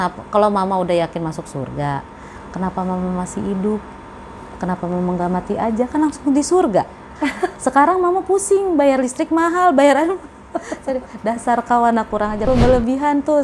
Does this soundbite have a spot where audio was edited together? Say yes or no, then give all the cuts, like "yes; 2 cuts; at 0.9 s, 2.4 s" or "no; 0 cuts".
yes; 1 cut; at 12.5 s